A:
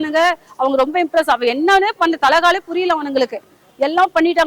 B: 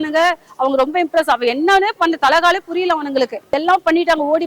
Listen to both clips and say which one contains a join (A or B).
B